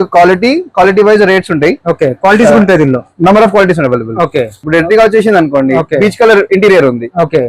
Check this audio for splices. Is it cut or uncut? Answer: cut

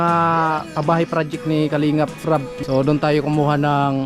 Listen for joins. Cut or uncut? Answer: cut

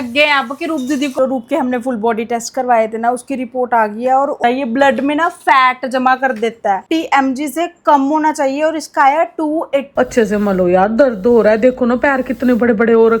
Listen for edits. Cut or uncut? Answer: cut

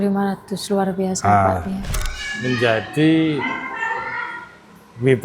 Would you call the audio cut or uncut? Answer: cut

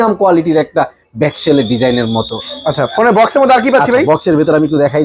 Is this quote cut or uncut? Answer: uncut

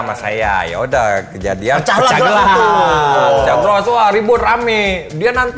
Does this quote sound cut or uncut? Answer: uncut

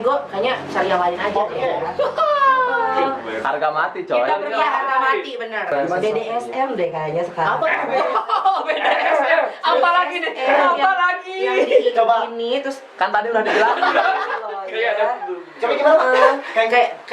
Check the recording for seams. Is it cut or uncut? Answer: cut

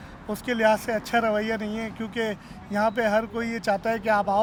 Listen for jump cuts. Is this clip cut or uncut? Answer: uncut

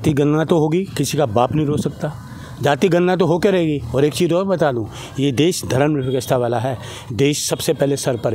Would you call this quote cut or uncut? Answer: uncut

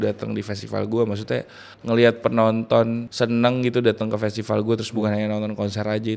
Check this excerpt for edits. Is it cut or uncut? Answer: cut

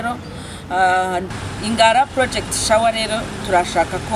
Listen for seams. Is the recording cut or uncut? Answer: cut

